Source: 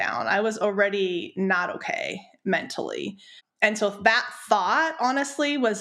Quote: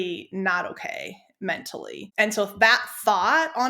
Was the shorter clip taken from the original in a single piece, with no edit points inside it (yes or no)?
no